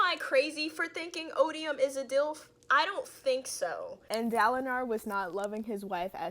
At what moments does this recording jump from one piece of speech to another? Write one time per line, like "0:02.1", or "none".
0:03.9